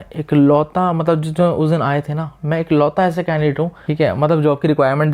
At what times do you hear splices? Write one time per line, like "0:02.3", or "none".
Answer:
0:03.8